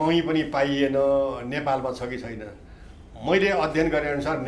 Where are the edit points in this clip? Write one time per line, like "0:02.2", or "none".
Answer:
none